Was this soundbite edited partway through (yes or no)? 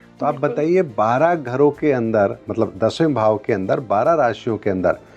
no